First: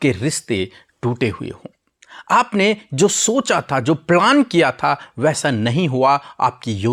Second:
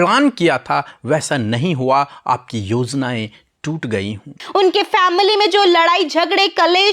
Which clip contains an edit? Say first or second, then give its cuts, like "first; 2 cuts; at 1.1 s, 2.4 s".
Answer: second; 1 cut; at 4.4 s